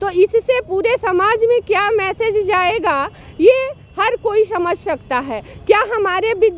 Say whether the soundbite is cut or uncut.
uncut